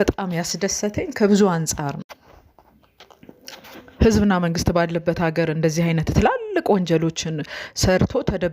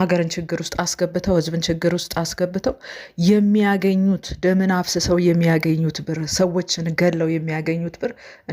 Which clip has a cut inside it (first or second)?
first